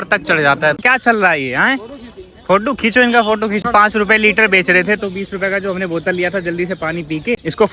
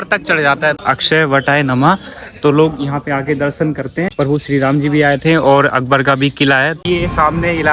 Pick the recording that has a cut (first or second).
second